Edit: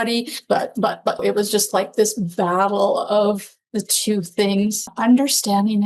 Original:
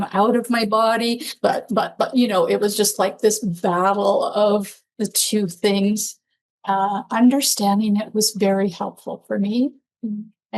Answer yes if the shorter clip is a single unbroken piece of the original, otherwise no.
no